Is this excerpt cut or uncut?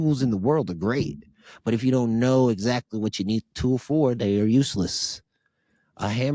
uncut